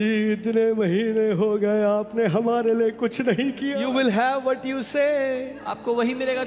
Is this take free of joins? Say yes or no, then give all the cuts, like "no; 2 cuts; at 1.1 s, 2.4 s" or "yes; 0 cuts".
no; 1 cut; at 3.8 s